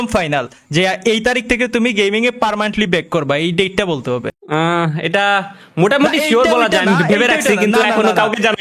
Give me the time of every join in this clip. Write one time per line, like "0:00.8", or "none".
0:04.4